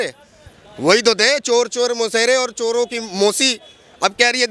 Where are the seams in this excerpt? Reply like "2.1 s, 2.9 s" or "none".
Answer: none